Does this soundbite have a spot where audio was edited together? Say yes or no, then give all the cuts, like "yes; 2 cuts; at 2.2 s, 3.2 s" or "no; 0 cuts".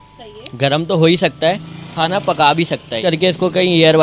yes; 1 cut; at 3.0 s